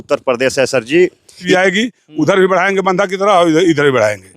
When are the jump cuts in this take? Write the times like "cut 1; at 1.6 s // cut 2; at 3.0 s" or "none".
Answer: cut 1; at 1.4 s